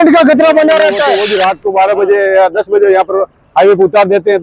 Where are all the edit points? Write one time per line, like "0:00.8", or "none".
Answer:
0:01.2